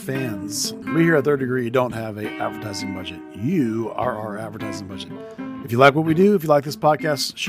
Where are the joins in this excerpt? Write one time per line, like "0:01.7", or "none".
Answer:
none